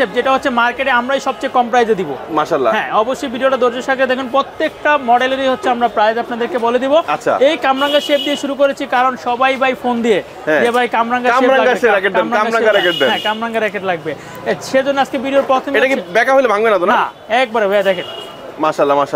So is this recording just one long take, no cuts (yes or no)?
yes